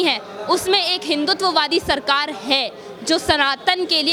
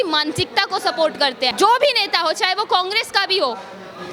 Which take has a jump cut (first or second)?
second